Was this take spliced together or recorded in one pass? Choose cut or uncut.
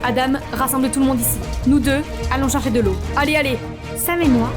uncut